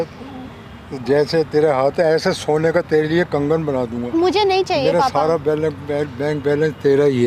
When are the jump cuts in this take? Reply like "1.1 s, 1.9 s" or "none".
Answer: none